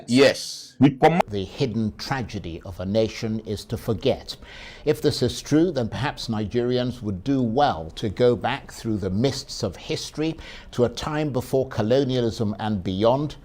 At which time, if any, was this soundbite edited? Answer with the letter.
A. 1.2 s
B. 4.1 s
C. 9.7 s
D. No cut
A